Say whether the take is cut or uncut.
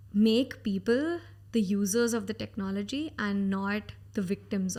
uncut